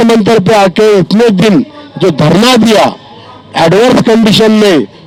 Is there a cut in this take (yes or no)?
no